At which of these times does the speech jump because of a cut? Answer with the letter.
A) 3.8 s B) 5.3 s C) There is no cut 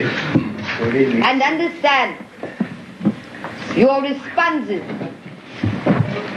A